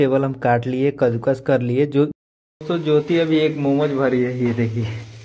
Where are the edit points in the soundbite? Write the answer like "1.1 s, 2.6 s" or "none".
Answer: 2.1 s